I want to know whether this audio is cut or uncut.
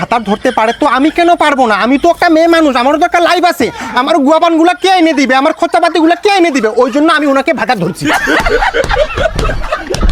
uncut